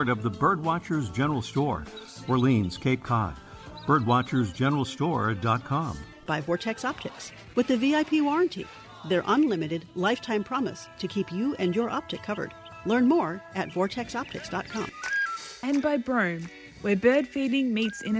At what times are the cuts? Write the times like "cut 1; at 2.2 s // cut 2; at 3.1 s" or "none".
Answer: cut 1; at 6.3 s